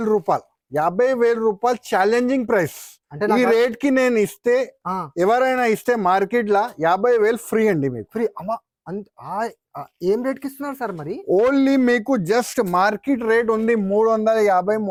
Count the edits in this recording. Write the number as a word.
zero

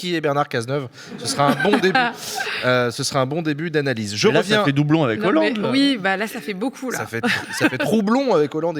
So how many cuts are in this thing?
zero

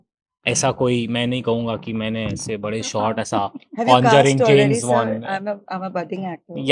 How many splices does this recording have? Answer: zero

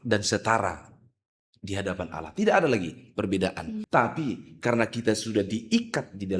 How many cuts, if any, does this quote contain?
one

